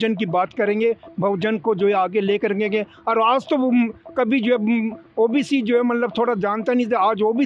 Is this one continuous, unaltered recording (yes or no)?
yes